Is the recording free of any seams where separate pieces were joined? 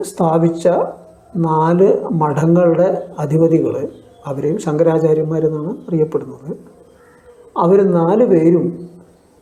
yes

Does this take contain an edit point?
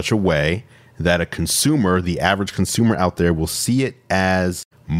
no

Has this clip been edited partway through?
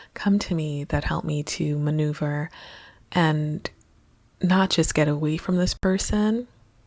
no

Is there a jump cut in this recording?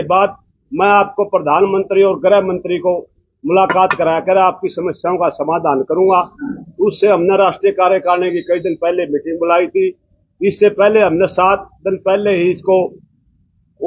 no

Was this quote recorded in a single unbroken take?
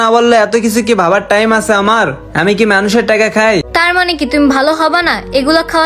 no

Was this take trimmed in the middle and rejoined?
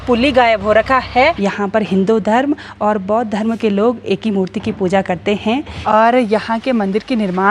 yes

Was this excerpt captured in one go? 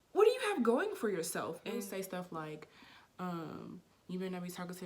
no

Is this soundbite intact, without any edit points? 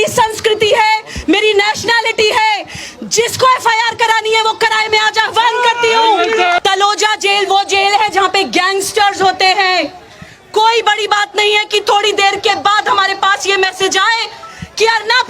no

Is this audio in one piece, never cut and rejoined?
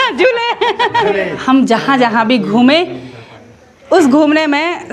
no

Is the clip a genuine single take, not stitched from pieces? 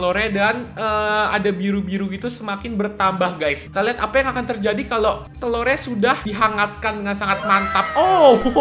no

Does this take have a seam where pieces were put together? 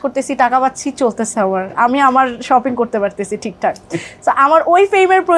no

